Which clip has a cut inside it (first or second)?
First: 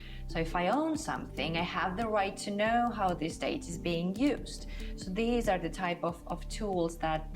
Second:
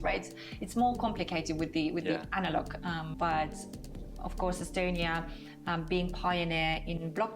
second